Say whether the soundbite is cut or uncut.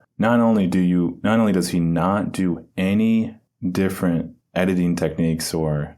cut